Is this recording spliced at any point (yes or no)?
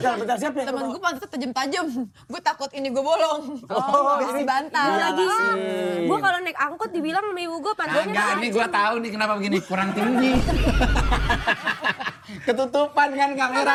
no